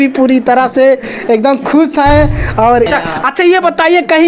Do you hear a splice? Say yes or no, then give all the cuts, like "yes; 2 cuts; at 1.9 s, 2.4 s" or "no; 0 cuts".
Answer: yes; 1 cut; at 2.9 s